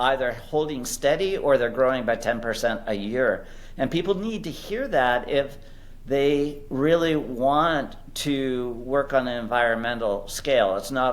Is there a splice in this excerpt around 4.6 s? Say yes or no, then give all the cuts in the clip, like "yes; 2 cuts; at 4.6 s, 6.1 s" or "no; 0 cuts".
no; 0 cuts